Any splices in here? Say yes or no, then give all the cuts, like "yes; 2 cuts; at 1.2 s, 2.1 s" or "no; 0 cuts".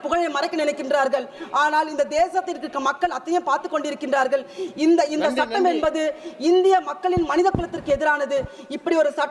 no; 0 cuts